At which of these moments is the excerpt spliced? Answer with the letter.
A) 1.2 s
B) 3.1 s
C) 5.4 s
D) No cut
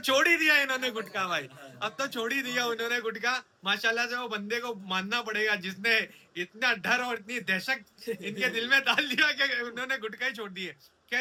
D